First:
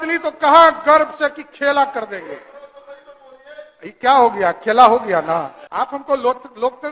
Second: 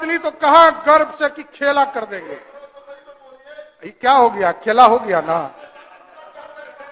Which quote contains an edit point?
first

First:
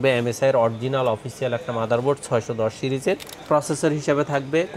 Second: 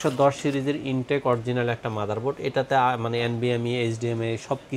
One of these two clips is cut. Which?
first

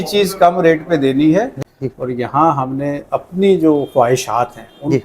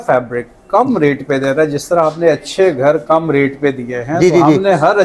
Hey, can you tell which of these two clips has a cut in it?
first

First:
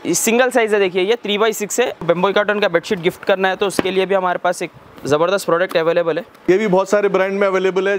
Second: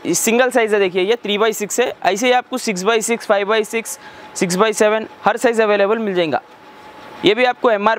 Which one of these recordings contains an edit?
first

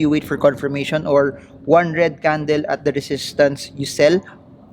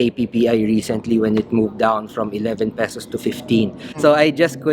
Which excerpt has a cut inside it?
second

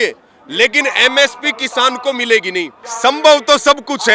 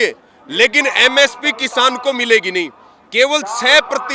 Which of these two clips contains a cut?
first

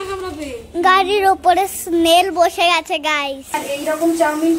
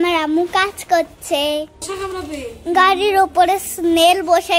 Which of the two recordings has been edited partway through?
first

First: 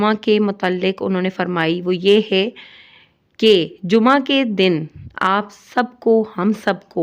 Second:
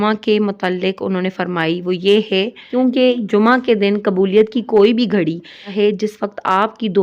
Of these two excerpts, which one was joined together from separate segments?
second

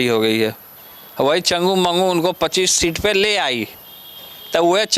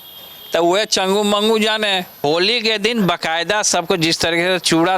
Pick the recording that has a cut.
second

